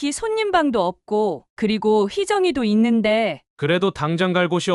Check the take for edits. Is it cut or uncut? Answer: cut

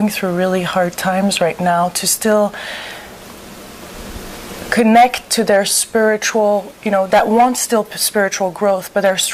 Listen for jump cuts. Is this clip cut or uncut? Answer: uncut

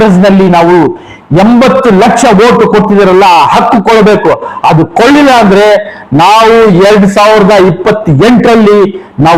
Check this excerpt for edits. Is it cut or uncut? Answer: uncut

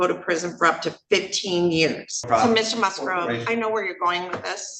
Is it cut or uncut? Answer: cut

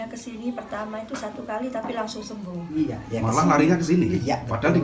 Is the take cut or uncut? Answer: cut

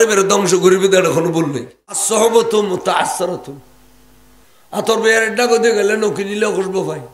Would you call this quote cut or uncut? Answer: cut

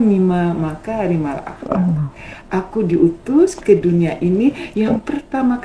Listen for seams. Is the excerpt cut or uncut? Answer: uncut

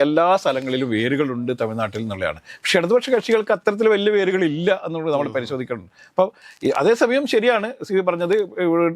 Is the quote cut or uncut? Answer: uncut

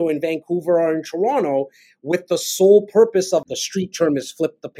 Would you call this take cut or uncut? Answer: cut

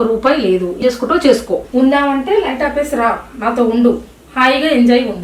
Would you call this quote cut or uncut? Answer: cut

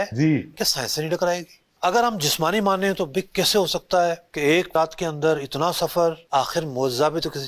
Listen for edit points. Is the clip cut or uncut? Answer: cut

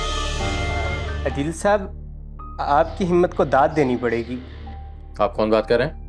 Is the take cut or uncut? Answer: cut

